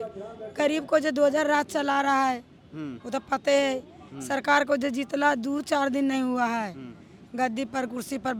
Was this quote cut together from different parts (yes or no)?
no